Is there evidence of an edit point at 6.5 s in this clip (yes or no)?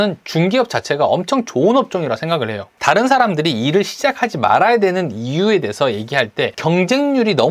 yes